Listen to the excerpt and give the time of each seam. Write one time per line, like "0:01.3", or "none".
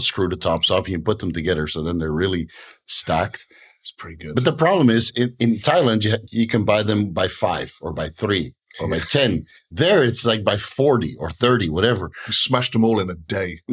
none